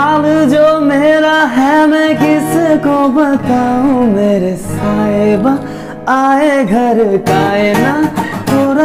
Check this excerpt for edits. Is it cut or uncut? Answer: uncut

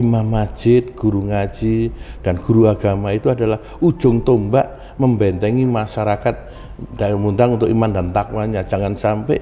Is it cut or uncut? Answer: uncut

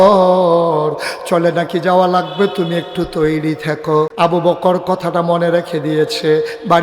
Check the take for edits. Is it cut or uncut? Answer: cut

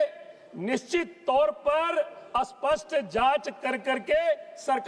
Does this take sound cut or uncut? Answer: uncut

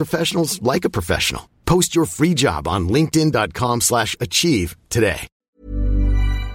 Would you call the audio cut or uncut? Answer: cut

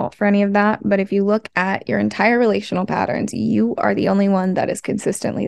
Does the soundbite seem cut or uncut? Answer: uncut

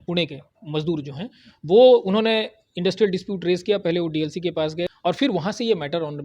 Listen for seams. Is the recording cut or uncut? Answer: cut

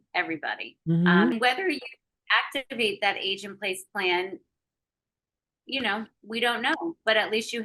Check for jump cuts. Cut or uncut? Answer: cut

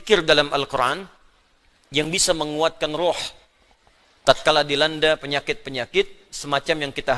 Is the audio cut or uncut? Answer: uncut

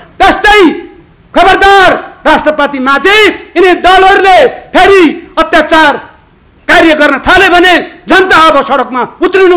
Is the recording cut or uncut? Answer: uncut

